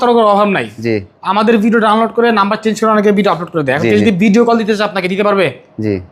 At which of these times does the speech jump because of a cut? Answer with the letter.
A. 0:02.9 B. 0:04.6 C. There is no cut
C